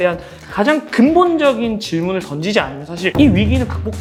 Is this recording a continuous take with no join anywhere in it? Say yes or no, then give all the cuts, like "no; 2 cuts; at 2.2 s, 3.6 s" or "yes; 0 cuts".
yes; 0 cuts